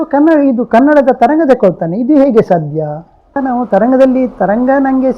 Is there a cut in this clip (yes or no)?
yes